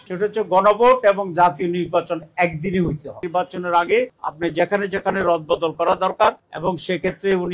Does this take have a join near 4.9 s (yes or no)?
no